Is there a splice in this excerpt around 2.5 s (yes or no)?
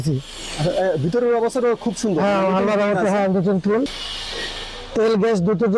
no